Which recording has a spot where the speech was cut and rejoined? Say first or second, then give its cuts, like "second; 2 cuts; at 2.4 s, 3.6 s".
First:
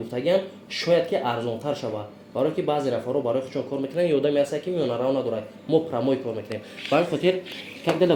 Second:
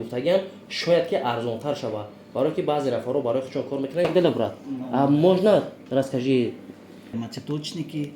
second; 2 cuts; at 4.0 s, 7.1 s